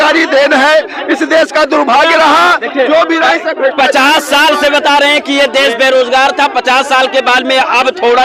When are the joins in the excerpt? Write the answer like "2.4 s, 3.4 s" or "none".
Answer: none